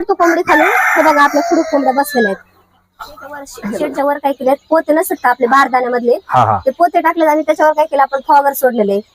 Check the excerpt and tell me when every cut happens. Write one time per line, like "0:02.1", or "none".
0:03.6